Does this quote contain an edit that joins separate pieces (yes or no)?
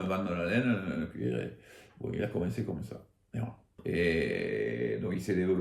yes